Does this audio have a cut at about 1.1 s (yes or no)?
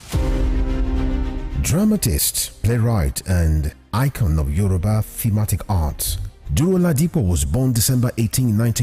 yes